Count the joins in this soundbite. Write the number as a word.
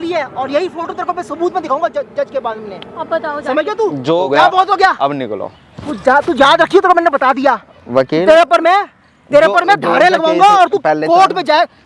one